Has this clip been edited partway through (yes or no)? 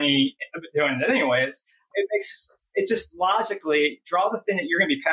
yes